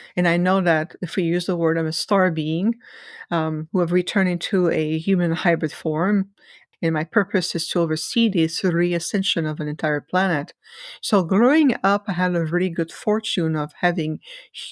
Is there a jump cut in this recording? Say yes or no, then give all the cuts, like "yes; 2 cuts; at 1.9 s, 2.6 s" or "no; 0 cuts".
yes; 1 cut; at 6.6 s